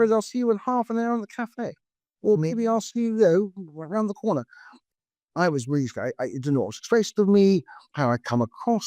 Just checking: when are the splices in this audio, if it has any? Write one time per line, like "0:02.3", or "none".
0:04.7